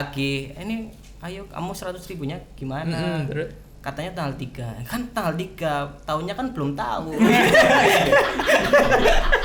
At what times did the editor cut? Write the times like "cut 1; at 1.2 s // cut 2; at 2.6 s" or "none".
none